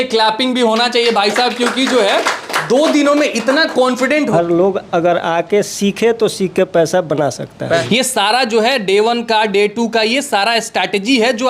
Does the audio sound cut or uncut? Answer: cut